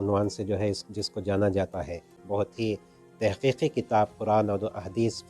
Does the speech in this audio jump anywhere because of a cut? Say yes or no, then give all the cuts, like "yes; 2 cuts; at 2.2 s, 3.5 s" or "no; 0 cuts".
yes; 1 cut; at 2.2 s